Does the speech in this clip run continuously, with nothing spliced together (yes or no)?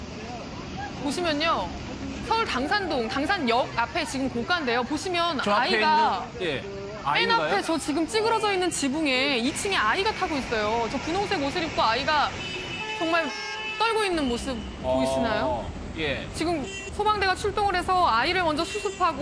no